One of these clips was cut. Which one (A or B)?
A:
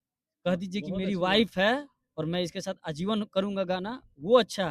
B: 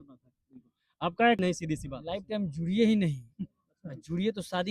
B